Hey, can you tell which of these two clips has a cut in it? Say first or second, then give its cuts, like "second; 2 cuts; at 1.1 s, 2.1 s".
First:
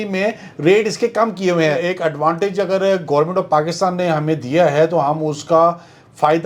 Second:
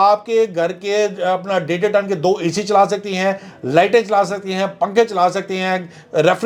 first; 1 cut; at 1.8 s